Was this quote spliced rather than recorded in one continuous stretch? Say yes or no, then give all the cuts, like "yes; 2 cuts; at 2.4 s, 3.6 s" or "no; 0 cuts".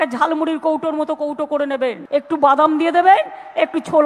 yes; 1 cut; at 2.0 s